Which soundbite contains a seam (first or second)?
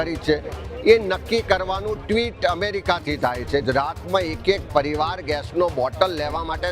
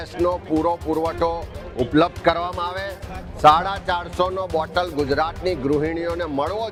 first